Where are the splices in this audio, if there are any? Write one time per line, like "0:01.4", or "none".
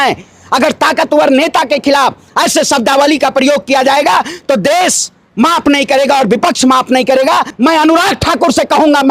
0:07.5